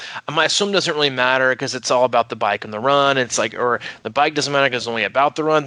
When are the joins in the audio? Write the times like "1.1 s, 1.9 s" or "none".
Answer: none